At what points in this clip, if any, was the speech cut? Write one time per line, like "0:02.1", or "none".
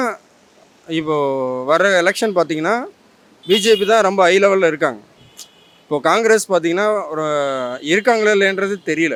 none